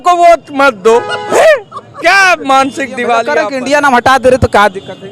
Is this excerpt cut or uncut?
cut